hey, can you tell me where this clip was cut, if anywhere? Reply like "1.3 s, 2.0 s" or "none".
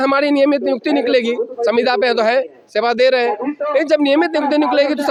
none